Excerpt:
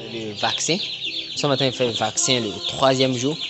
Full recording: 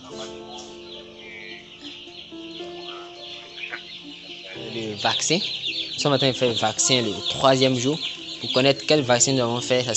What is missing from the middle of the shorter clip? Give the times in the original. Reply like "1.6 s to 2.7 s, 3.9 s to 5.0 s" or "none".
none

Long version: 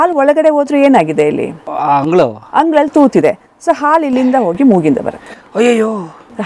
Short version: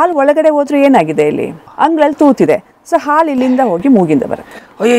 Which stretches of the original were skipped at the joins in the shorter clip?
1.7 s to 2.4 s

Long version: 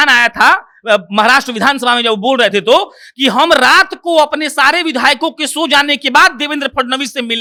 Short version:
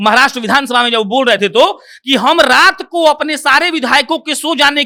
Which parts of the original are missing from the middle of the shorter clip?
none

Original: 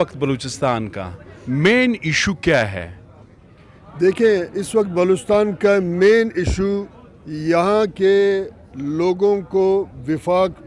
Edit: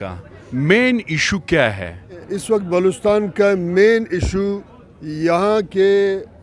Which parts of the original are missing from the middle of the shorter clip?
3.3 s to 4.6 s

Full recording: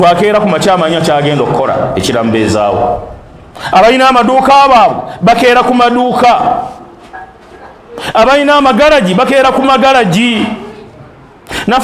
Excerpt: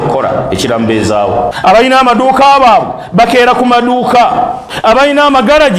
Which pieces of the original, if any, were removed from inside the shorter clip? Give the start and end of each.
3.0 s to 3.6 s, 6.7 s to 8.0 s

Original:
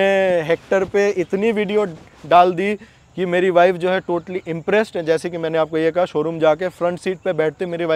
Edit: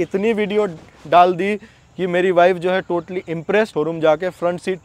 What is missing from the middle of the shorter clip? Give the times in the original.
4.9 s to 6.1 s

